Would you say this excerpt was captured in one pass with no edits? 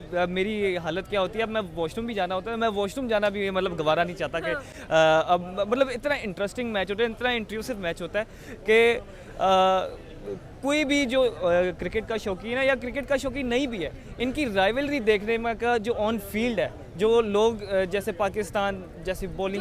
yes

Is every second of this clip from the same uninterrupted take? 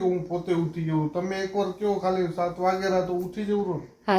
yes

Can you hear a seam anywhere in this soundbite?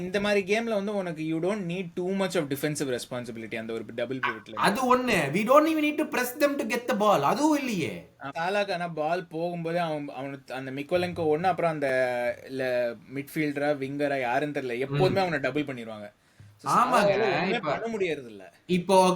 yes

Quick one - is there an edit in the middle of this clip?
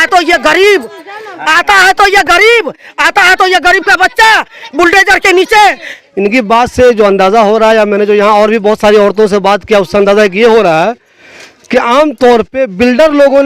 yes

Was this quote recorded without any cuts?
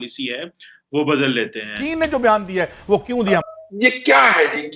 no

